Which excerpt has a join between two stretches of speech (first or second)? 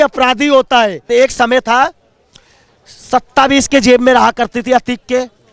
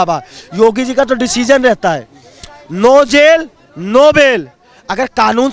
first